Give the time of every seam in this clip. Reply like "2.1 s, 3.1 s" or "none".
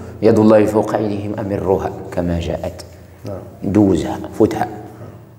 none